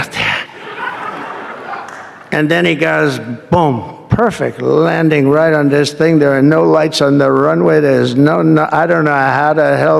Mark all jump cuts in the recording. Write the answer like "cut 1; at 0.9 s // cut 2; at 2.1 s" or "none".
none